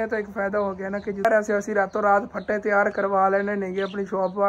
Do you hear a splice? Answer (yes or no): yes